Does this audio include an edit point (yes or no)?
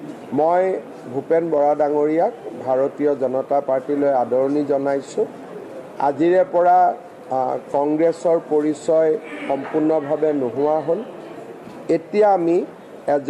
no